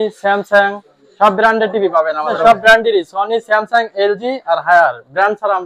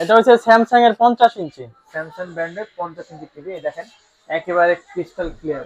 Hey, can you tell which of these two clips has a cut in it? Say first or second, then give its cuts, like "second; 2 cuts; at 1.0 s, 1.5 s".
first; 1 cut; at 2.3 s